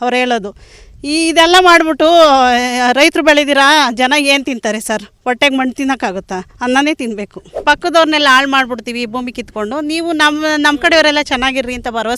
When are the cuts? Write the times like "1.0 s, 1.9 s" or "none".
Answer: 7.5 s